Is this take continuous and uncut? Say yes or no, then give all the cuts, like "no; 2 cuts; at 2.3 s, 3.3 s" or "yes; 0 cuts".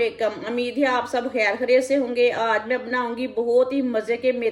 yes; 0 cuts